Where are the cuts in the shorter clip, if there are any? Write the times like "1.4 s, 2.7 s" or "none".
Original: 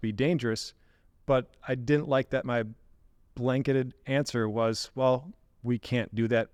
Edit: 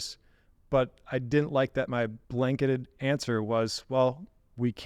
2.2 s

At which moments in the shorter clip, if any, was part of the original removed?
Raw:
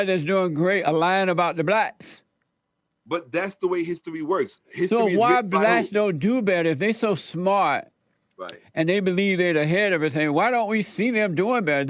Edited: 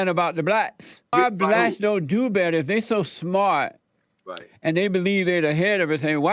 1.1 s

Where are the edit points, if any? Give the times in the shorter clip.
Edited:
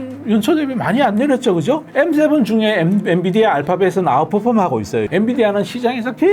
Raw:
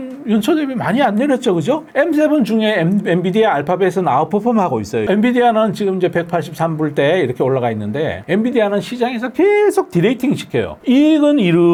5.0 s

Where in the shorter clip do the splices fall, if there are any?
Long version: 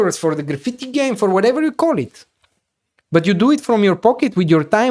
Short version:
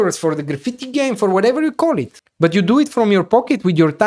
2.2 s

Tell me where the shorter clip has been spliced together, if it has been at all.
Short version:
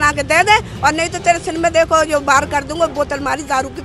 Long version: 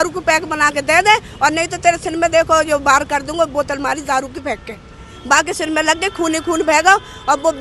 none

